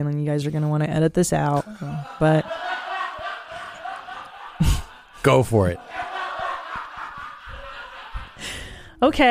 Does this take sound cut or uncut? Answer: cut